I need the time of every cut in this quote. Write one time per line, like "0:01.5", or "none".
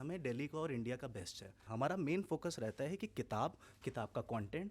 0:01.7